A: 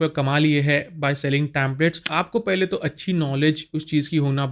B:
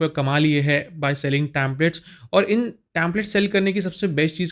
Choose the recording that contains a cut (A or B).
A